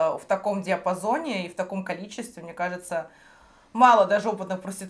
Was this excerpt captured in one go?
yes; 0 cuts

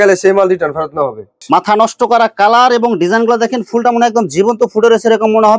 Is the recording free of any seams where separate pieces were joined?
no; 1 cut; at 1.3 s

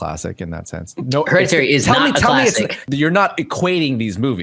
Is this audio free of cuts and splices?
no; 1 cut; at 2.8 s

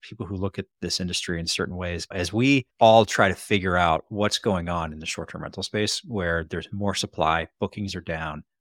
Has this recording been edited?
yes; 1 cut; at 2.7 s

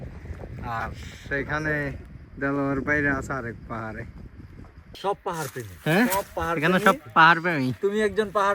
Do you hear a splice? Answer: yes; 1 cut; at 4.8 s

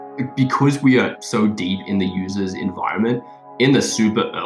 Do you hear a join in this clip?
no; 0 cuts

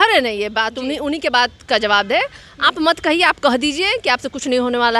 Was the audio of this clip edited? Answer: no; 0 cuts

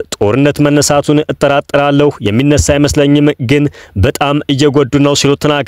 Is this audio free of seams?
yes; 0 cuts

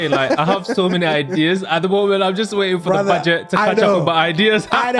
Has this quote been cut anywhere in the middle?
no; 0 cuts

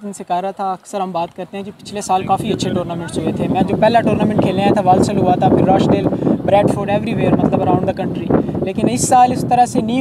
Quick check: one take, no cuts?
yes; 0 cuts

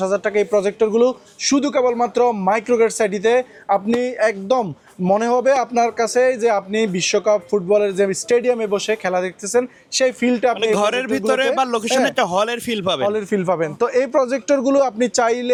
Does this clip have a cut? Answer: no; 0 cuts

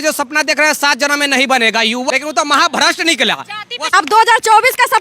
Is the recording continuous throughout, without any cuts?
no; 2 cuts; at 2.1 s, 3.9 s

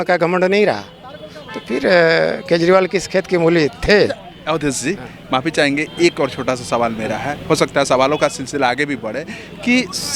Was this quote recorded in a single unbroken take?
yes; 0 cuts

